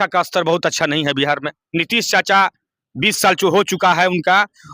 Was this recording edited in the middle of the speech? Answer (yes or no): yes